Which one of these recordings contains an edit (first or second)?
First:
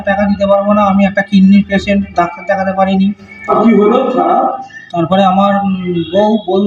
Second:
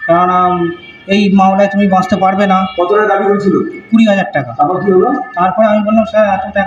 first